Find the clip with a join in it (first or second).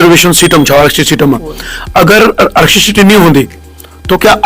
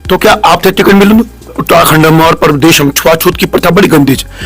second